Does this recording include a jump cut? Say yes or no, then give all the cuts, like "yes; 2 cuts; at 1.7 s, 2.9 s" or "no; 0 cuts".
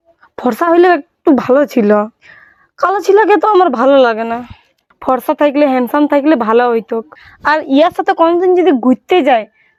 no; 0 cuts